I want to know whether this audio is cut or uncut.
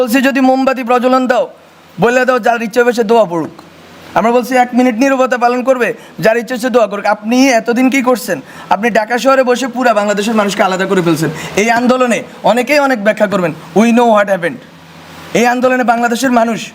uncut